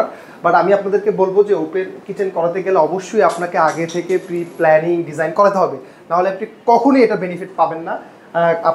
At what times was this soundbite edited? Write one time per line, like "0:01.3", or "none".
none